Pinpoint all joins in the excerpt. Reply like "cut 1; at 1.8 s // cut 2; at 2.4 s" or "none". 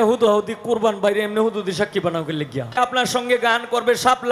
cut 1; at 2.8 s